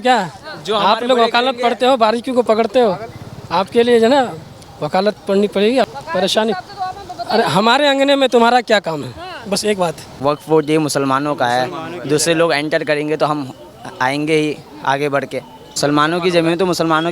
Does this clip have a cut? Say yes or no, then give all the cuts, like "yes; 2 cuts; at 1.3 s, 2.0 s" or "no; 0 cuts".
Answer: yes; 3 cuts; at 5.8 s, 10.2 s, 15.6 s